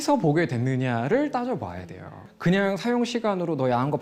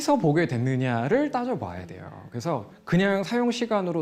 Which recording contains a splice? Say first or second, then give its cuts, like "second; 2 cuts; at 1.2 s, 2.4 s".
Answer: first; 1 cut; at 2.3 s